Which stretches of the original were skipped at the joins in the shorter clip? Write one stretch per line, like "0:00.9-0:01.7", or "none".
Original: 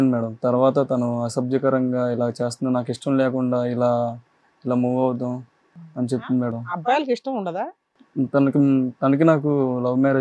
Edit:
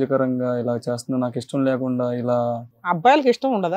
0:04.4-0:06.7